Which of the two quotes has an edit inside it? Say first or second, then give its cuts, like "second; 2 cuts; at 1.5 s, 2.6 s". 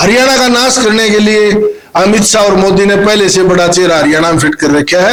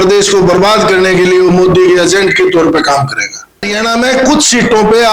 second; 1 cut; at 3.7 s